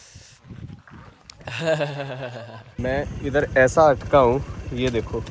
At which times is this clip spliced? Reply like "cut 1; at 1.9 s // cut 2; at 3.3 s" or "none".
cut 1; at 2.8 s